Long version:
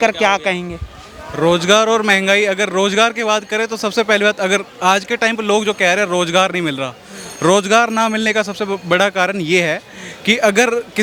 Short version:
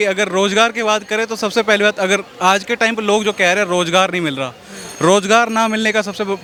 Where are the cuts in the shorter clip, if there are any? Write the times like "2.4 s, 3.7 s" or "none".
none